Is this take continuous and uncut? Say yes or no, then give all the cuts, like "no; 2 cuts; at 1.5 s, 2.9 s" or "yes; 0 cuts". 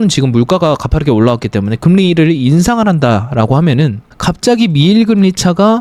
yes; 0 cuts